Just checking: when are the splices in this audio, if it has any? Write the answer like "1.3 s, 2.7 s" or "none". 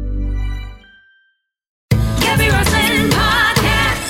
1.9 s